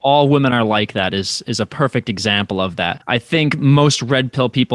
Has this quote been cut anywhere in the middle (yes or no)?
yes